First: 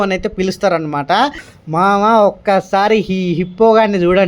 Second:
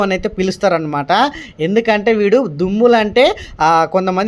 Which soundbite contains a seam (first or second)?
first